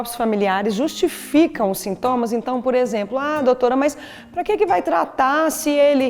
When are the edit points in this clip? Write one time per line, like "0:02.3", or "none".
none